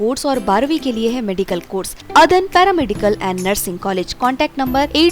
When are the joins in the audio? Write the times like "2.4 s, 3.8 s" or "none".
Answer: 2.0 s